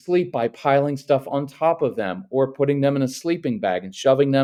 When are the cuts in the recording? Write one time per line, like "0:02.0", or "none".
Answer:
none